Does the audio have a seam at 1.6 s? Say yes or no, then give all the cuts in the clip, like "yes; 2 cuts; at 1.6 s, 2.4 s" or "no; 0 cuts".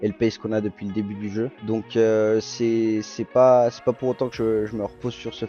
yes; 1 cut; at 1.6 s